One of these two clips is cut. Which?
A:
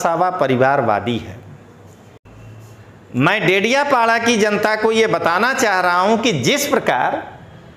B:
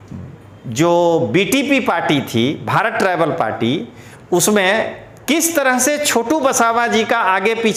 A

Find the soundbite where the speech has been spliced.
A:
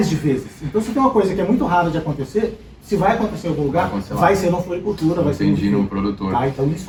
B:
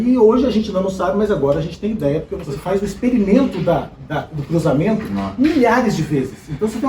B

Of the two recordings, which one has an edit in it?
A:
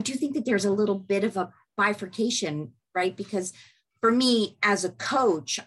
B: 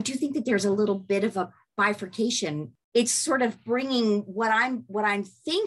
B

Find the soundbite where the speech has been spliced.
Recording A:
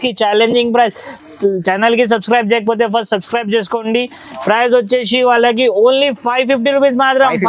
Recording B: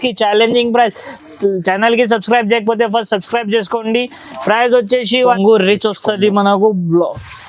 B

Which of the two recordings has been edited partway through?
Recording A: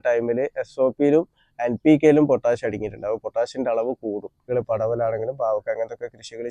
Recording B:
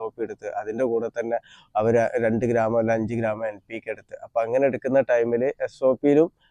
A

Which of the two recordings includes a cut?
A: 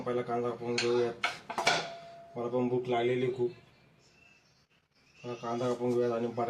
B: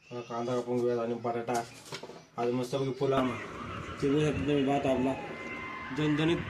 B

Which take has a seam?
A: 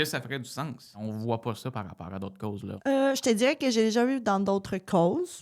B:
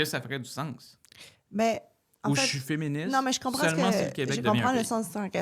A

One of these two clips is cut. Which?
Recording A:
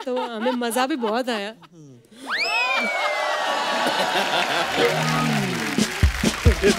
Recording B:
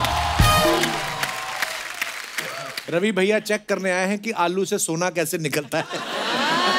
B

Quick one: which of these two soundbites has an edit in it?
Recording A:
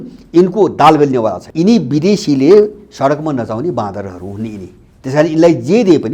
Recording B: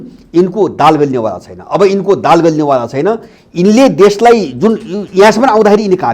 A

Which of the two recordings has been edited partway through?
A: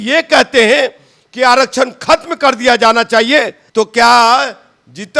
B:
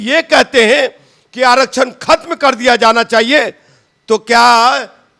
A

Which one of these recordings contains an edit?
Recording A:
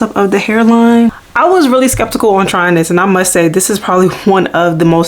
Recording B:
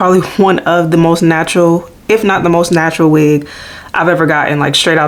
A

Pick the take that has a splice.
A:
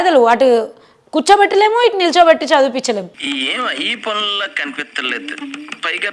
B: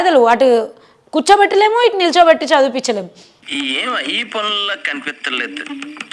A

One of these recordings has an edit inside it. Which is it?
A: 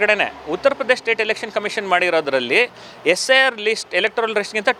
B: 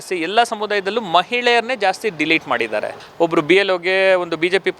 B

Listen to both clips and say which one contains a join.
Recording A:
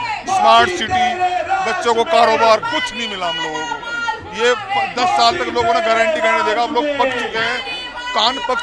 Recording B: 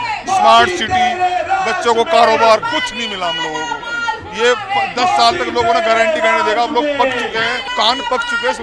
B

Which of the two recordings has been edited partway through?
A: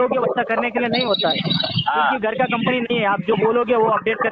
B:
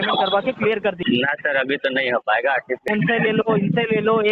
B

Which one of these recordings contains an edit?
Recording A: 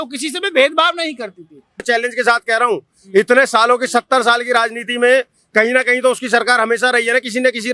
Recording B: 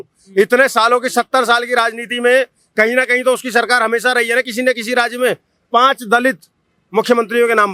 A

